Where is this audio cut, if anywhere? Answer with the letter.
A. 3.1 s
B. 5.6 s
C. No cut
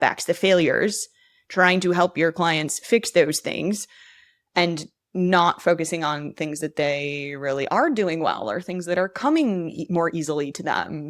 C